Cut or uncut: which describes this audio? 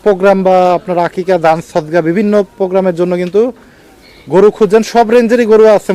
uncut